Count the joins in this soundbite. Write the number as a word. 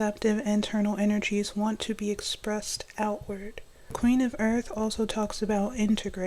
one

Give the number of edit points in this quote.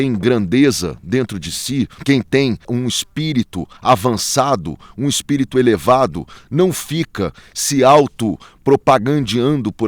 two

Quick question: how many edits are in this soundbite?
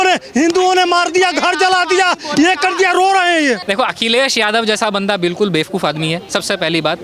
one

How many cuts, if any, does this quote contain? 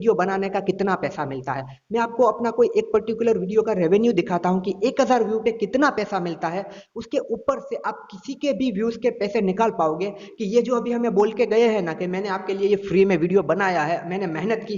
zero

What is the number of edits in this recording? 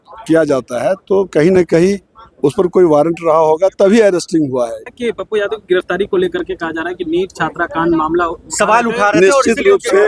one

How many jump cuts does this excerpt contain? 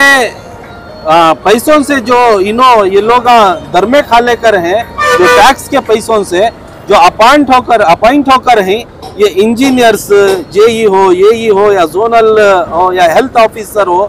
zero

